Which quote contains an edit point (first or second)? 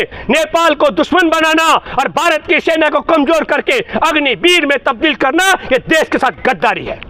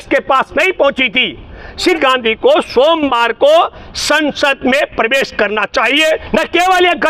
second